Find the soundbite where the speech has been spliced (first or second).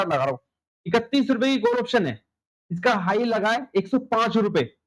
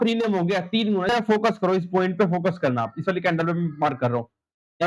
second